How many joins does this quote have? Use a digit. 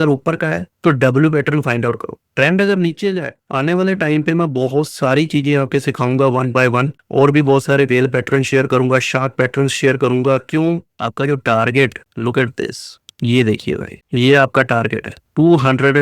2